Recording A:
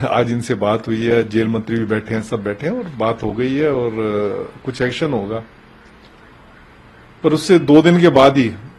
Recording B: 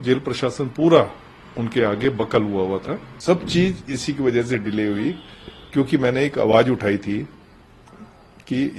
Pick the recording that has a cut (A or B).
B